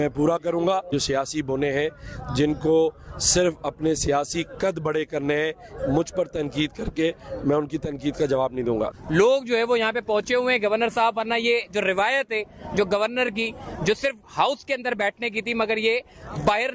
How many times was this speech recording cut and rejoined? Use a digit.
2